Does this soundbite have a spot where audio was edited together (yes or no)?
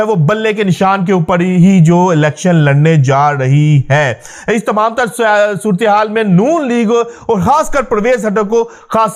no